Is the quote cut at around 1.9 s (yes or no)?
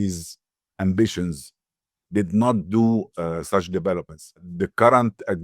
no